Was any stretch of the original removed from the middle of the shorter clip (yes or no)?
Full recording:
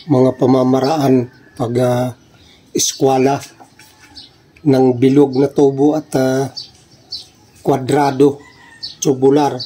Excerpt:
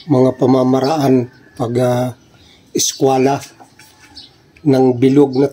no